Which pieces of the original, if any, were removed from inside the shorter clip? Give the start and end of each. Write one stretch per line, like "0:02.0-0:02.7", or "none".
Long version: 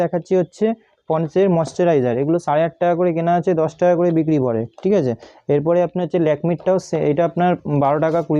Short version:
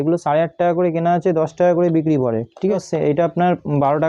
0:05.0-0:06.7